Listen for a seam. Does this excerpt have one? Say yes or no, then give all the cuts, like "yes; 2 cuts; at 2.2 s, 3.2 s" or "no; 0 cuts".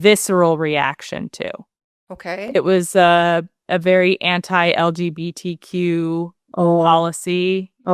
no; 0 cuts